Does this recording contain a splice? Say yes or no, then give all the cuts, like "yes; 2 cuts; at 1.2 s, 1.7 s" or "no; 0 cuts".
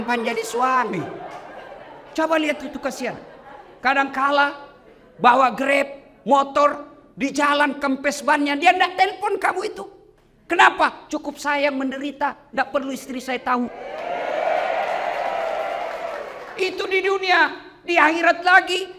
no; 0 cuts